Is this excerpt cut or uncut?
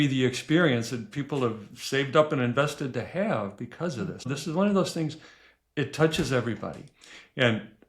cut